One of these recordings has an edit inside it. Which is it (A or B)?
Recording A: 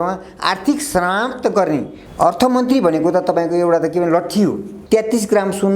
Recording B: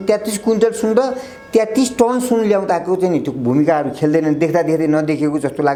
A